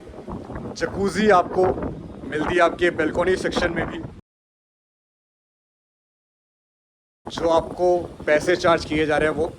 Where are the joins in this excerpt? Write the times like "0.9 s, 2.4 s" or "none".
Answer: none